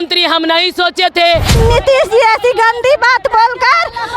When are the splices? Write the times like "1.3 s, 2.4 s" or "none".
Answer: 1.5 s